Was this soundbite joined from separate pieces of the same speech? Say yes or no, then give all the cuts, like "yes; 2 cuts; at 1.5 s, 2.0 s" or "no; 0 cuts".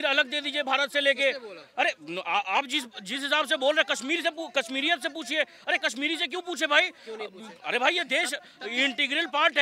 no; 0 cuts